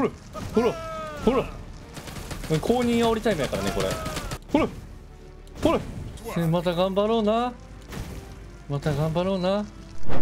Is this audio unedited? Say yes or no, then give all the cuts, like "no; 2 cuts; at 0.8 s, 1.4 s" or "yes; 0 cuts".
yes; 0 cuts